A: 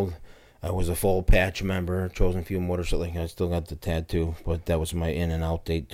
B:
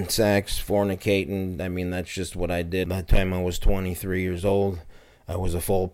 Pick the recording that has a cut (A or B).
B